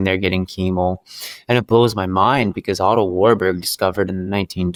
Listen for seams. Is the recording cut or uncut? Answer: uncut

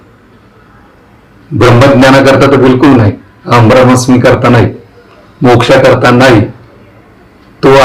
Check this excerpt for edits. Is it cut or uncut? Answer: uncut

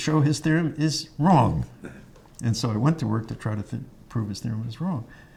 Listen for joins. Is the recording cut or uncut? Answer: uncut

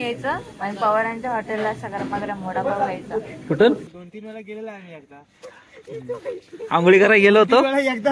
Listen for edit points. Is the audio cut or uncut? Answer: cut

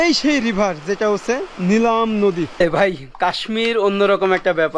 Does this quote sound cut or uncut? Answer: cut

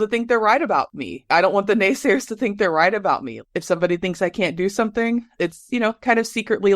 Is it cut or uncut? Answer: cut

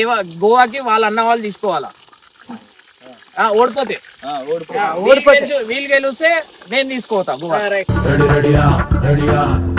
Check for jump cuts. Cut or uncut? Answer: uncut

